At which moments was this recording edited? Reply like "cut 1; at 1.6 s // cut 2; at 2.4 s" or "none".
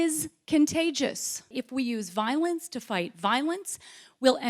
cut 1; at 1.5 s